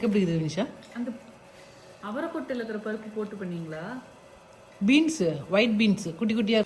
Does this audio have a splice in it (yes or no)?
no